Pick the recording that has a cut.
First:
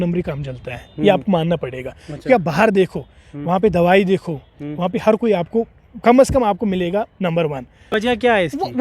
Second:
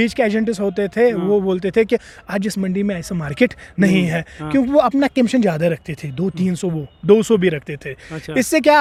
first; 1 cut; at 7.9 s

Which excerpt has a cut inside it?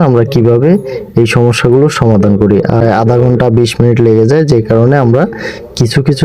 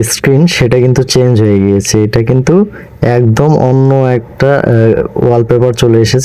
first; 1 cut; at 2.8 s

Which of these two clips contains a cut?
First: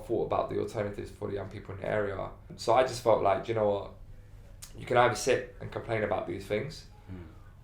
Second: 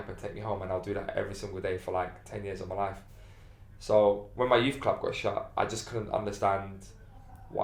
first; 1 cut; at 2.5 s

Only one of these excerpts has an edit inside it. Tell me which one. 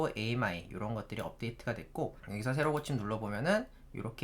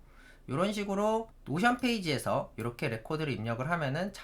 first; 1 cut; at 2.2 s

